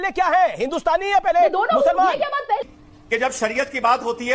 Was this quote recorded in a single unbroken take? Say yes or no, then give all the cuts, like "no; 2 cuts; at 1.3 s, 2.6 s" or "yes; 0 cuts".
no; 1 cut; at 2.6 s